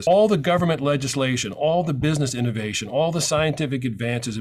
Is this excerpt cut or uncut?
uncut